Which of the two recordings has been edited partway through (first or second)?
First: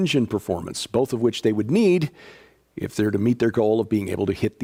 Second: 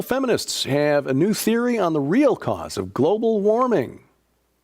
second